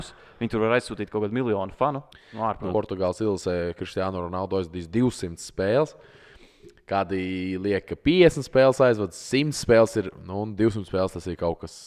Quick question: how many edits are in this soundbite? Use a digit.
1